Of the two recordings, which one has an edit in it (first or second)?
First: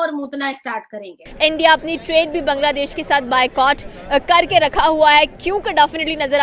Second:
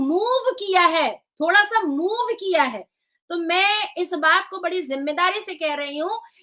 first